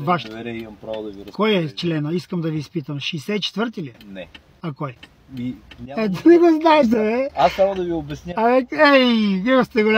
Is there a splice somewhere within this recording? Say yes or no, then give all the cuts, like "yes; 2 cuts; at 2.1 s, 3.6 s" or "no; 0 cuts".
no; 0 cuts